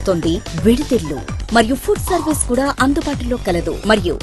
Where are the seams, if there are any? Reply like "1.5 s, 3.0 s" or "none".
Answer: none